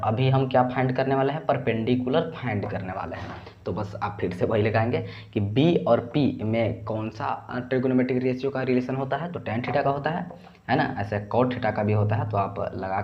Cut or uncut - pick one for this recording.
uncut